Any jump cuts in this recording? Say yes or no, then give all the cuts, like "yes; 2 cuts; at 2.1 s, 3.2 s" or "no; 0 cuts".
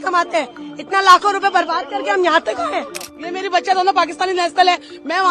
yes; 1 cut; at 3.1 s